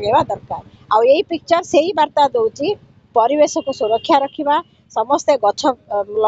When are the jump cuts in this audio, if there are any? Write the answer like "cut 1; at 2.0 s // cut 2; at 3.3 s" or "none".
none

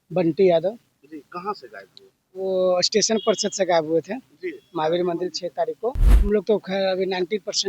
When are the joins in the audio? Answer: cut 1; at 6.1 s

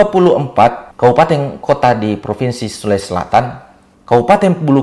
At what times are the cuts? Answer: cut 1; at 0.9 s // cut 2; at 1.5 s

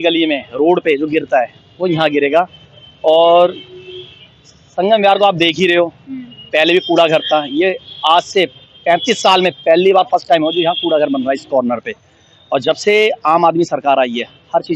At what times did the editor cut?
none

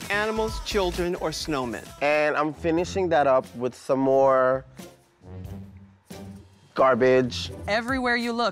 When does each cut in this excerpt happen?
cut 1; at 1.9 s // cut 2; at 7.5 s

